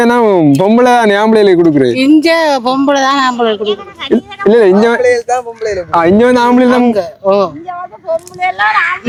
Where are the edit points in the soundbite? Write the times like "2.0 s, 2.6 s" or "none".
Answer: none